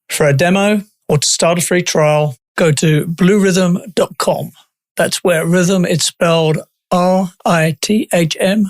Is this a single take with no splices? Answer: no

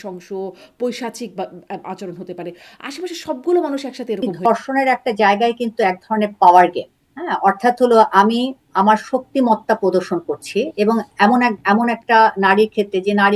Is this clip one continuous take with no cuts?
no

